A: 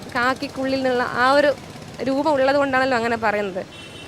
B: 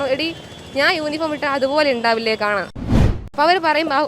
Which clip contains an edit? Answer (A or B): B